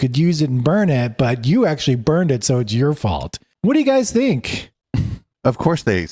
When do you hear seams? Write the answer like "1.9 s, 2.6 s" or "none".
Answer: none